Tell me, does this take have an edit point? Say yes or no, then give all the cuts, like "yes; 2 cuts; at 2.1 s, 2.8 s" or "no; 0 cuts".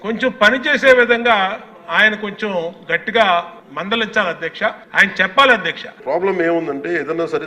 yes; 1 cut; at 5.9 s